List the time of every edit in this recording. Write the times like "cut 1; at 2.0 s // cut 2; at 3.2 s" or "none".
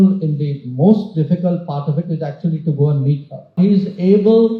cut 1; at 3.5 s

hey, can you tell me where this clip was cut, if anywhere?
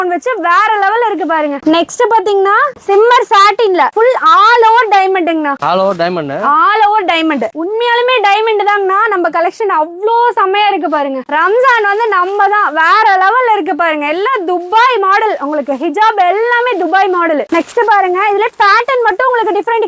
none

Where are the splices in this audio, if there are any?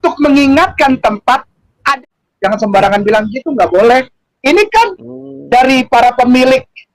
cut 1; at 1.9 s

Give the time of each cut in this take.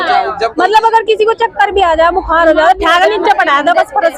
none

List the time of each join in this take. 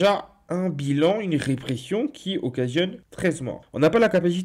none

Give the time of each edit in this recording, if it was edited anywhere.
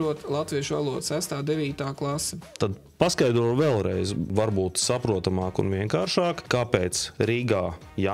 cut 1; at 2.4 s // cut 2; at 4.3 s

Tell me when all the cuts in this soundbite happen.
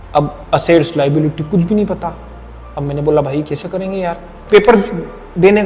cut 1; at 4.3 s

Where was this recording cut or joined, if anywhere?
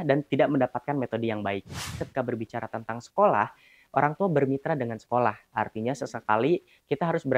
cut 1; at 2.0 s

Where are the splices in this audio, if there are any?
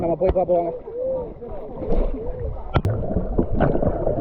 cut 1; at 2.9 s

